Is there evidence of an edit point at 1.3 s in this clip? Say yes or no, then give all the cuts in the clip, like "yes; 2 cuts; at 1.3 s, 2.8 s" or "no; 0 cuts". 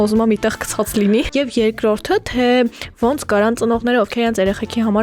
yes; 1 cut; at 1.3 s